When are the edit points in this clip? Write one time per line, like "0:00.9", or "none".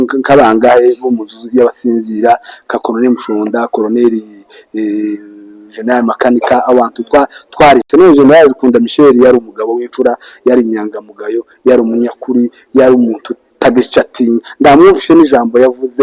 0:07.9